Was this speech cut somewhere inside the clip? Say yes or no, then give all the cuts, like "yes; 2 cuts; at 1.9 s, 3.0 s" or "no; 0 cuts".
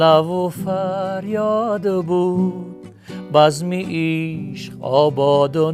no; 0 cuts